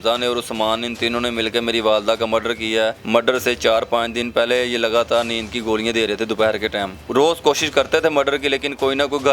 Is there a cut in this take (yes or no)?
yes